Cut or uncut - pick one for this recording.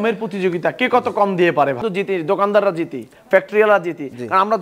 cut